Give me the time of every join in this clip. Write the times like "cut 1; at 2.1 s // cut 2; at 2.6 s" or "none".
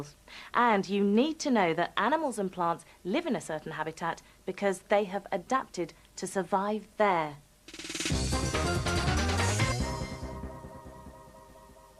none